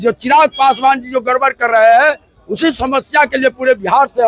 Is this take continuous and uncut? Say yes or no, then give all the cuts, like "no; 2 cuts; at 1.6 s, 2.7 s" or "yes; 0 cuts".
yes; 0 cuts